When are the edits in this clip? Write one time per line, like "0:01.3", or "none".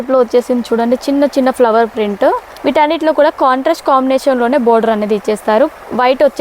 0:02.5